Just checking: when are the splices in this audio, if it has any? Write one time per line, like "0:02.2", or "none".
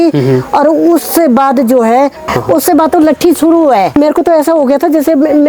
0:02.3
0:03.9